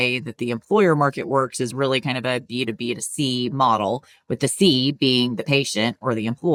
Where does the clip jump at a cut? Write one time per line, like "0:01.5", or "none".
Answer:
none